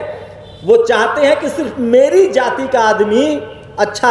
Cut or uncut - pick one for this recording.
uncut